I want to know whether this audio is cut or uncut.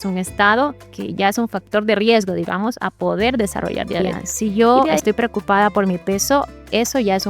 cut